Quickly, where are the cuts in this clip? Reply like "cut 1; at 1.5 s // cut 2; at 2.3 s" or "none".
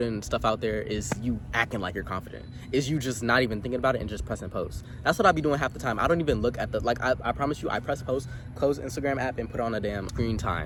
none